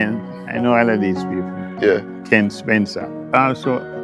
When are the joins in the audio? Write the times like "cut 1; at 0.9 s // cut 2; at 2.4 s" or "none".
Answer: cut 1; at 2.1 s // cut 2; at 3.1 s